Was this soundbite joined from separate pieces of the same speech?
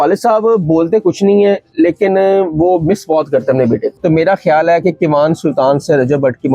yes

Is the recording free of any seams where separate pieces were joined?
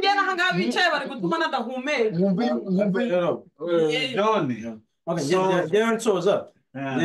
yes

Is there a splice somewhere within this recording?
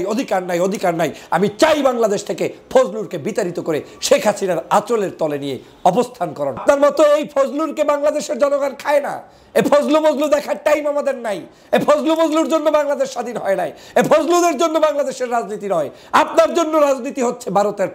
yes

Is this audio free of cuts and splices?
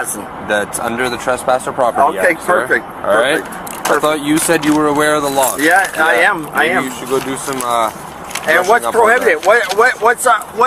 yes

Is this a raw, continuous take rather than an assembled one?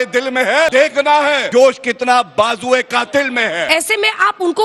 no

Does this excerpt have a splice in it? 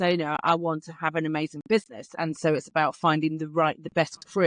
no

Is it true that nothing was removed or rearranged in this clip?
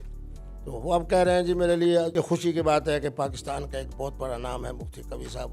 no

